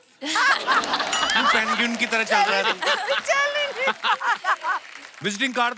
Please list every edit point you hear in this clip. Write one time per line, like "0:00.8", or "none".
none